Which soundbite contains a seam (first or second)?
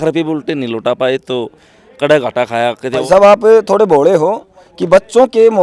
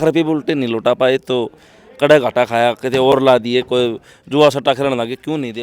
first